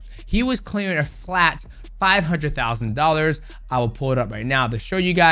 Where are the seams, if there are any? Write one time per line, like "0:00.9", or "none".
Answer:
none